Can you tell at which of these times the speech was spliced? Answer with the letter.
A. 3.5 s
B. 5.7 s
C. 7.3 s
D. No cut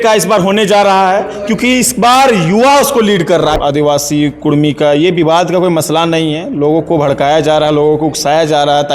A